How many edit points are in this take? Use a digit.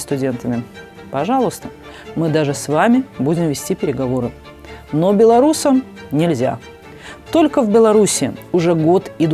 0